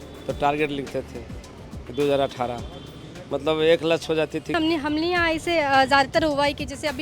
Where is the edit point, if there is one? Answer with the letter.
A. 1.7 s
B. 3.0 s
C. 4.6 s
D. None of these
C